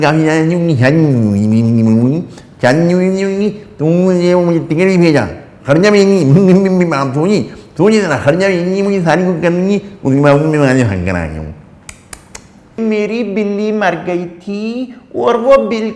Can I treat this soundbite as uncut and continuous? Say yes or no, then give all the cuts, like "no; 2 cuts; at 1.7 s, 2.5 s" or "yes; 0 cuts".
no; 1 cut; at 12.8 s